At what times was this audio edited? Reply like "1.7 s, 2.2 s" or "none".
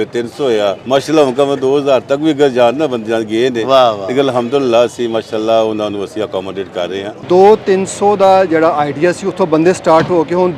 0.8 s, 7.2 s